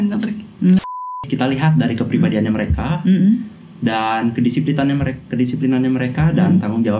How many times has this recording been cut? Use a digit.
1